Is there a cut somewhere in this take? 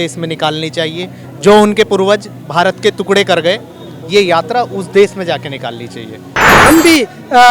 yes; 1 cut; at 6.5 s

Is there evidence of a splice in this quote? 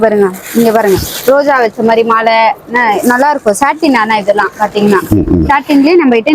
no; 0 cuts

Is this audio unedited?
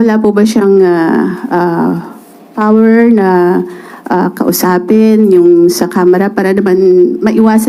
yes; 0 cuts

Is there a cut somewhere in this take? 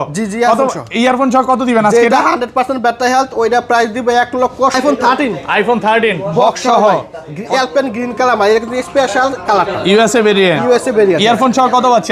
yes; 1 cut; at 4.8 s

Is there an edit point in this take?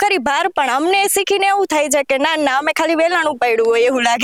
no; 0 cuts

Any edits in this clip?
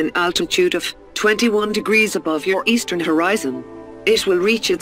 yes; 2 cuts; at 0.9 s, 2.3 s

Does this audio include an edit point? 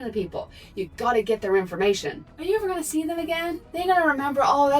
yes; 1 cut; at 2.3 s

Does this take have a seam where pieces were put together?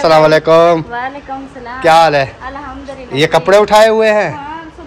no; 0 cuts

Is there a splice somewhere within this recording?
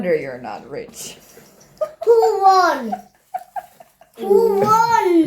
no; 0 cuts

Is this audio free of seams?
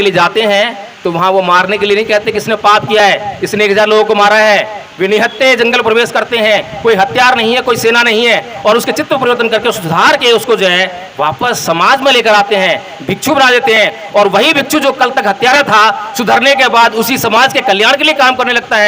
yes; 0 cuts

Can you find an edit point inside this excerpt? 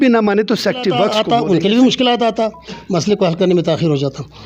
yes; 1 cut; at 1.1 s

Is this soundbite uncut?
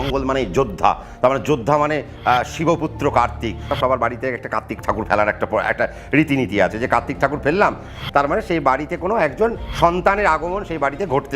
no; 3 cuts; at 3.7 s, 8.0 s, 9.6 s

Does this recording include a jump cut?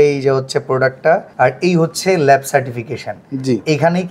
yes; 1 cut; at 1.3 s

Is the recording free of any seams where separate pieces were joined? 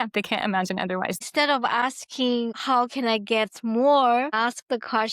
no; 2 cuts; at 1.2 s, 2.6 s

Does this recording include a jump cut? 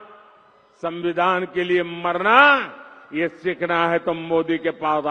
no; 0 cuts

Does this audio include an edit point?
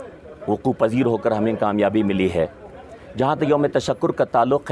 no; 0 cuts

